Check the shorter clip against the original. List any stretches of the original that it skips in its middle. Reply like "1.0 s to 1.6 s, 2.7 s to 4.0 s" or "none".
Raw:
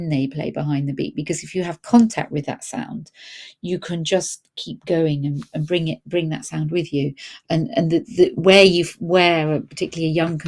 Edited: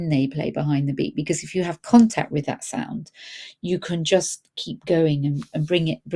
none